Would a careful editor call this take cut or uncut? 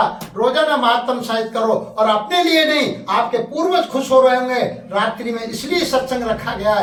uncut